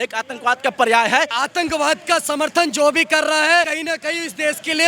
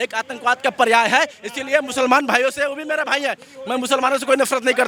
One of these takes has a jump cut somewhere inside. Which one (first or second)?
first